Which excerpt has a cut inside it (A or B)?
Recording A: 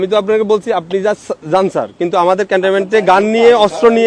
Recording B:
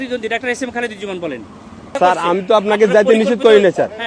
B